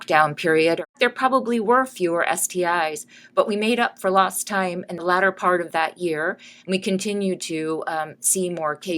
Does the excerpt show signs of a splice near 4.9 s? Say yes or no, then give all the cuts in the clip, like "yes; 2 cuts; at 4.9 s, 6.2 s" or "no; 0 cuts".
yes; 2 cuts; at 0.9 s, 4.9 s